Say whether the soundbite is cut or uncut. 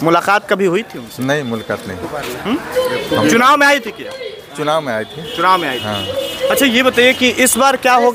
uncut